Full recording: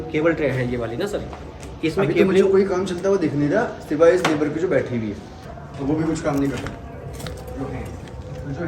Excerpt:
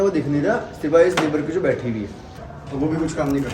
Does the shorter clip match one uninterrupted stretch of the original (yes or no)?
yes